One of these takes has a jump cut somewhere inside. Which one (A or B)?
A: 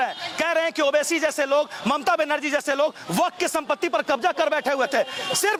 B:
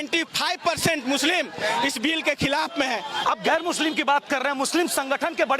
B